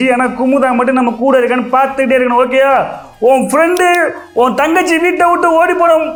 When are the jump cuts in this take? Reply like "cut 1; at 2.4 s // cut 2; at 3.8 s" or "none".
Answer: none